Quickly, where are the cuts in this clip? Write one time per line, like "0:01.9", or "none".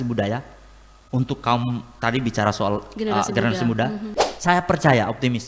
0:04.1